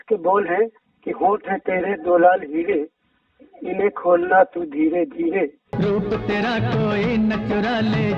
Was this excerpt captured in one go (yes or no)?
no